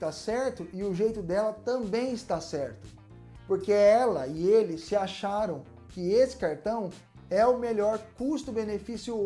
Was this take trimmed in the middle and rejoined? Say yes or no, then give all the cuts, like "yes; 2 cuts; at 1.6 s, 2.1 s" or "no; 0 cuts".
no; 0 cuts